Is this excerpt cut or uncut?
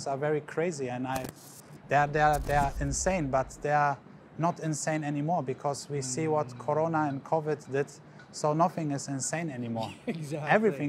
uncut